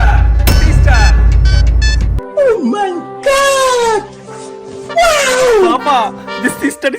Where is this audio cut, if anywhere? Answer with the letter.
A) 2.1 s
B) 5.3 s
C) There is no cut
A